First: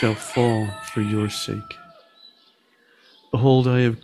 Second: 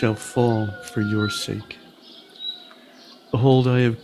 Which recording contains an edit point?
second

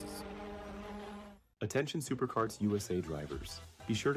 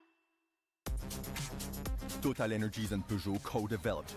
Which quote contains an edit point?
first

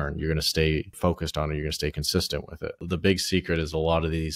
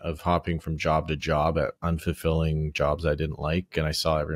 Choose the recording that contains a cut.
first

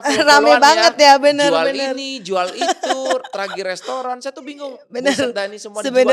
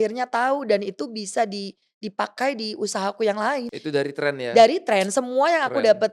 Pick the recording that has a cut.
second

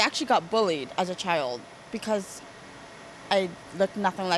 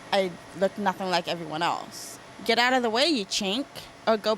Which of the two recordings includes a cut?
second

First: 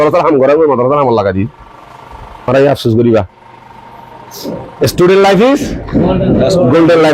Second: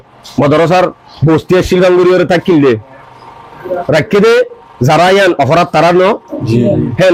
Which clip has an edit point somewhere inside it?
first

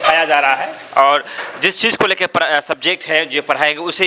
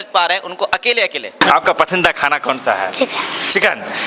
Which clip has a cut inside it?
second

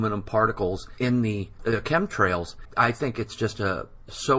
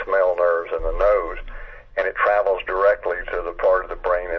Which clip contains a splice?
first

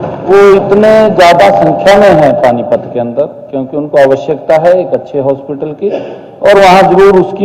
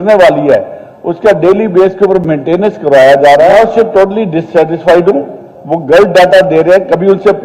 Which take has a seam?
second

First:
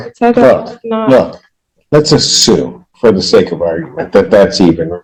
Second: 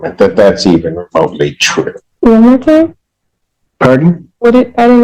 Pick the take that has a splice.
second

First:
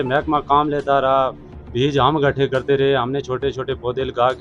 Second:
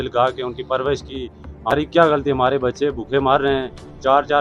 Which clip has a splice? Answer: second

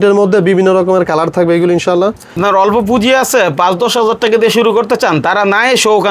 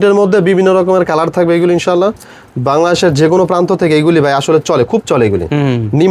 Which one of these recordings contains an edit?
first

